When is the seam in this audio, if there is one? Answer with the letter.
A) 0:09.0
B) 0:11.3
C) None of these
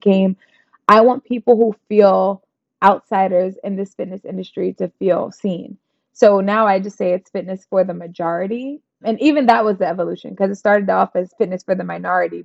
A